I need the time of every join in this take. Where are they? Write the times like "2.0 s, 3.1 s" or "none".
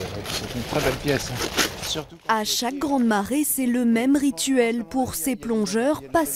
none